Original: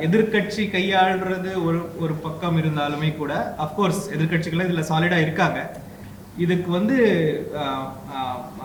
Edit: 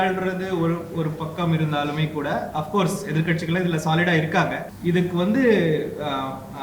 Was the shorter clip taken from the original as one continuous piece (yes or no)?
no